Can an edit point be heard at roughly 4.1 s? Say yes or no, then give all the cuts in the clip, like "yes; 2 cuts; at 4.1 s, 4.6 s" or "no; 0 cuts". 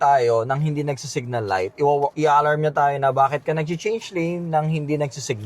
no; 1 cut; at 2.1 s